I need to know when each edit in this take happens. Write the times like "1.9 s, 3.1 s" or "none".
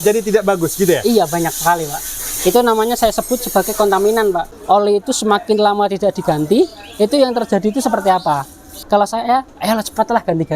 4.4 s, 8.8 s